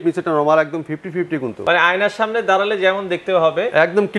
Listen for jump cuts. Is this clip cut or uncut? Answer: cut